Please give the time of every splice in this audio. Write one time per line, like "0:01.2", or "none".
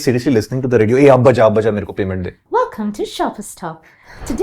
0:02.3